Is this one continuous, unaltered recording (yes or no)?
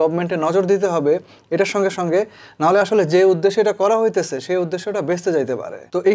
yes